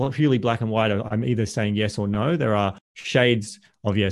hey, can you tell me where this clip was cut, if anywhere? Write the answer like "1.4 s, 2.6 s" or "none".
none